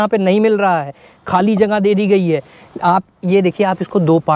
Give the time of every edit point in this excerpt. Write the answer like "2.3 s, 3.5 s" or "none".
none